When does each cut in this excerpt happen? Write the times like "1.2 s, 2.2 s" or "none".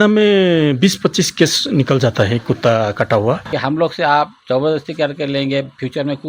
3.5 s